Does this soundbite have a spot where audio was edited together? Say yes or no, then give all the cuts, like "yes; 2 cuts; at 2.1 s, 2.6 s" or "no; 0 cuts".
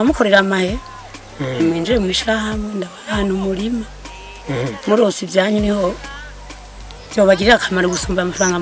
no; 0 cuts